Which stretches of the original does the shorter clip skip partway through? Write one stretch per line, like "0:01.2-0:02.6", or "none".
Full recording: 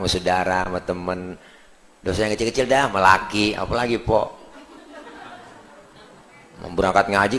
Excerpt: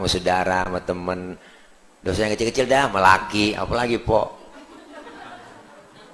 none